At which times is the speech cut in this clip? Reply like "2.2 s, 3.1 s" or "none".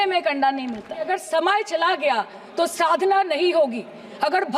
1.1 s